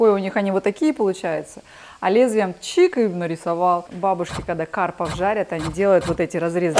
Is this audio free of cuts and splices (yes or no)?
no